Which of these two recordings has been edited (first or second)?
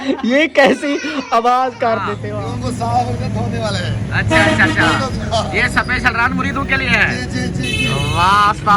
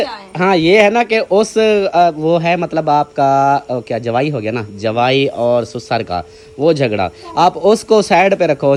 first